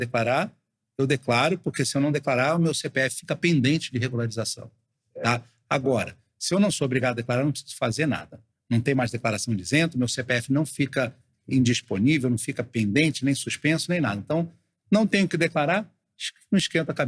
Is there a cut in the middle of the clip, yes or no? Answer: no